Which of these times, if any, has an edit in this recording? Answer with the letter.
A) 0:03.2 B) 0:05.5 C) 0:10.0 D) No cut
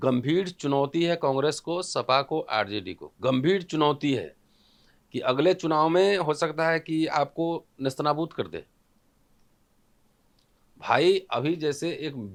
D